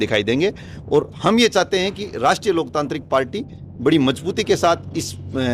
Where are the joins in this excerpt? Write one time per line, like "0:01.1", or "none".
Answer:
none